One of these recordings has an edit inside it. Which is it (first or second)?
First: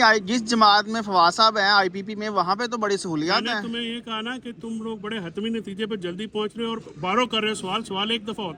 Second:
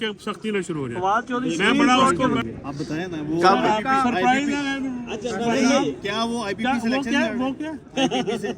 second